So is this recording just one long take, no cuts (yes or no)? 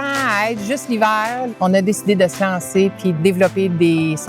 no